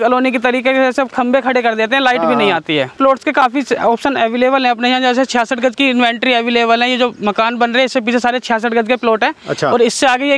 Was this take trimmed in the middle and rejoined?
yes; 1 cut; at 3.0 s

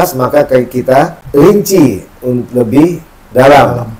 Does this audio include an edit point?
yes; 1 cut; at 1.5 s

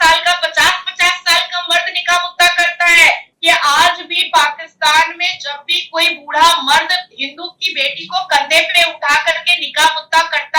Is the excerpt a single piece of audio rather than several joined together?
no; 1 cut; at 3.3 s

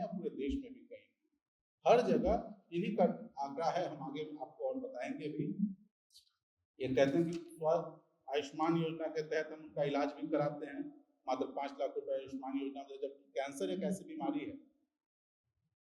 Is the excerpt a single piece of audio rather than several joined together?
yes; 0 cuts

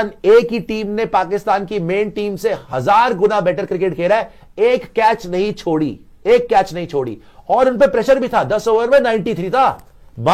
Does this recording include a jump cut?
no; 0 cuts

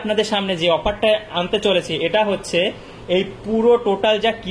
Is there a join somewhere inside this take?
no; 0 cuts

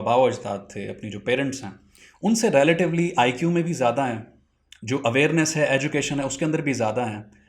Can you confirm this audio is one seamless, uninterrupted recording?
yes; 0 cuts

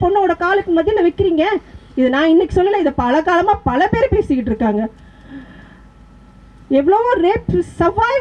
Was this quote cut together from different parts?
no; 0 cuts

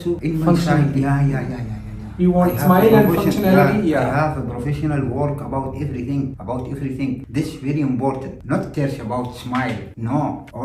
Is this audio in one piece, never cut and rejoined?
yes; 0 cuts

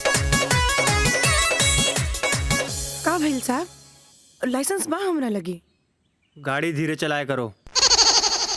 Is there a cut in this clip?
yes; 1 cut; at 1.2 s

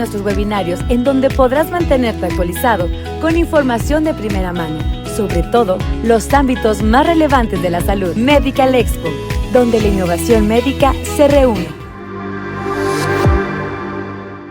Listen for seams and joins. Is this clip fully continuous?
no; 1 cut; at 11.6 s

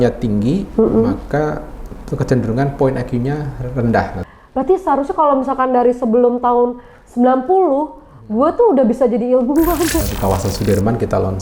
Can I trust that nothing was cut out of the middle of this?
no; 2 cuts; at 4.2 s, 10.1 s

